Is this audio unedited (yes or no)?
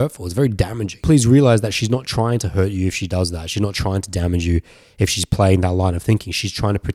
no